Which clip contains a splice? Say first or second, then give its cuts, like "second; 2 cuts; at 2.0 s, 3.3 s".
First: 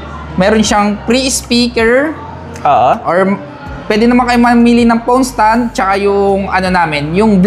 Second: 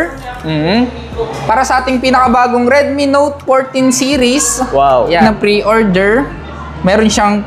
second; 1 cut; at 5.2 s